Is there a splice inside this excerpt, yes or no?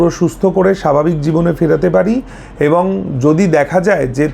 no